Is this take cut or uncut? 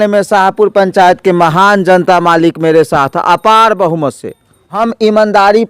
cut